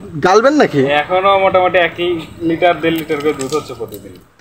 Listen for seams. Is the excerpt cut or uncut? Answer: uncut